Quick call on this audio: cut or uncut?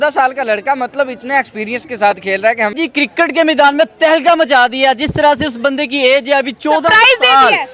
cut